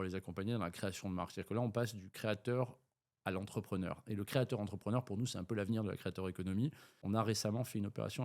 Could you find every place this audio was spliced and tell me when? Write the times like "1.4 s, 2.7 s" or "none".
6.9 s

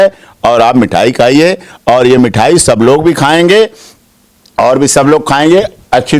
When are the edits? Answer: none

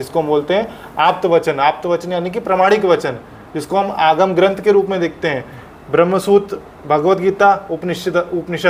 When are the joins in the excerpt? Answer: none

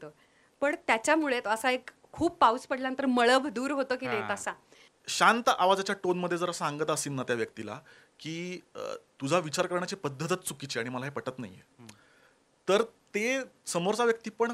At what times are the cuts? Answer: 4.9 s

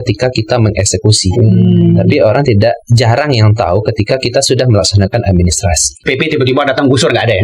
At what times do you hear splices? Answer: 6.0 s

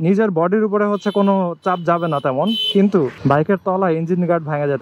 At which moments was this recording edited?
3.2 s

